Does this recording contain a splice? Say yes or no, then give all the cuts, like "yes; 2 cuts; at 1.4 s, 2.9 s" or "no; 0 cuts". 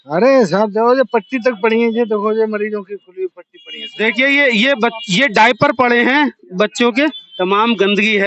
yes; 1 cut; at 7.2 s